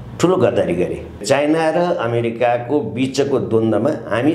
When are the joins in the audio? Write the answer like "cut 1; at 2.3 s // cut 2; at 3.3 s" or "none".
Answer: cut 1; at 1.1 s

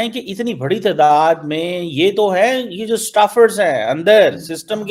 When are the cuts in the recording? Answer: none

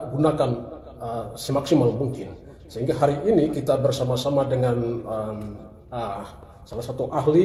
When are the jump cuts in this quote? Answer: none

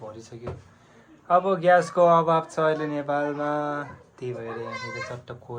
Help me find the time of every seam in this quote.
none

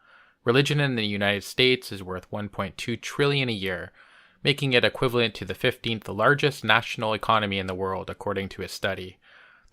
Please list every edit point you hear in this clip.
cut 1; at 1.2 s

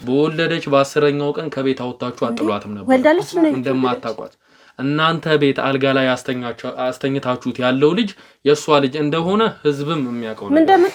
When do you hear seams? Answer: none

